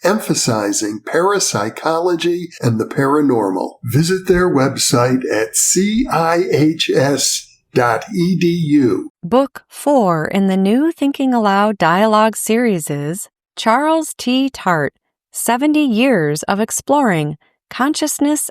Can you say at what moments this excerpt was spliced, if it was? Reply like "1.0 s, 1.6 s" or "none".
9.1 s